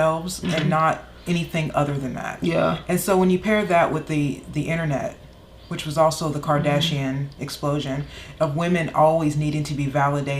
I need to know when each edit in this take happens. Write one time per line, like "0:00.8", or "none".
none